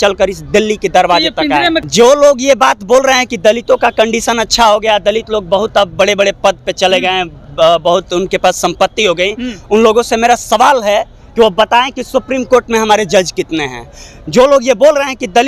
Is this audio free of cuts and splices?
no; 1 cut; at 1.8 s

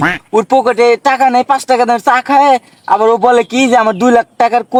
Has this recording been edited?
no; 0 cuts

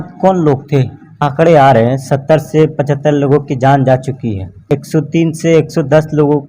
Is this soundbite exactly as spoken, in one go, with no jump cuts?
no; 2 cuts; at 1.2 s, 4.6 s

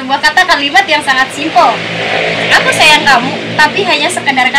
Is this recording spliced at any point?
no; 0 cuts

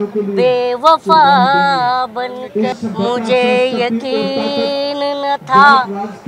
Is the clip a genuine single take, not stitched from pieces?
no; 1 cut; at 2.7 s

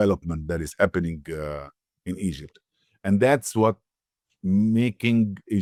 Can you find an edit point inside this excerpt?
no; 0 cuts

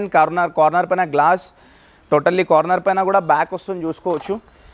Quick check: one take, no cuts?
yes; 0 cuts

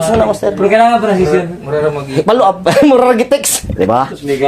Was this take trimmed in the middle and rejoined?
yes; 1 cut; at 3.6 s

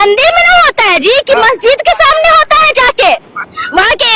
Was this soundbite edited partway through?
no; 0 cuts

